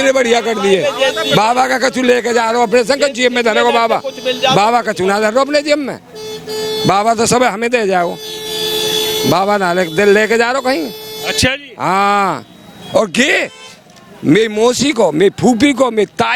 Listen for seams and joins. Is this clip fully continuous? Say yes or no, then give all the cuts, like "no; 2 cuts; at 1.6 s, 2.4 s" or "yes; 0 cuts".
yes; 0 cuts